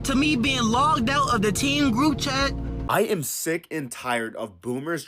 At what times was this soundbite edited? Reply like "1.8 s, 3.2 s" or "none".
2.7 s